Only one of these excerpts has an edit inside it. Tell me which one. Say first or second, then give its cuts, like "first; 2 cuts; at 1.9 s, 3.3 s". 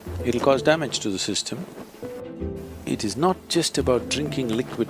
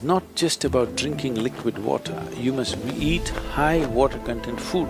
first; 1 cut; at 2.2 s